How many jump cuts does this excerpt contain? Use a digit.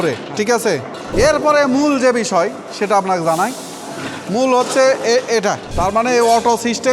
2